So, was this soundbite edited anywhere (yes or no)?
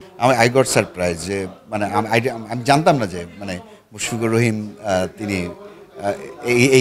no